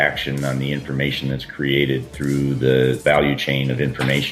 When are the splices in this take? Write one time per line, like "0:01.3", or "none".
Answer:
0:03.0